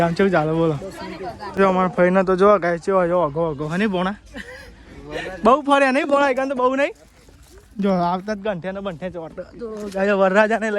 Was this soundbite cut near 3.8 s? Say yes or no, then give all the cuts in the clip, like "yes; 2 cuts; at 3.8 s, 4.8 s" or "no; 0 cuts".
no; 1 cut; at 1.4 s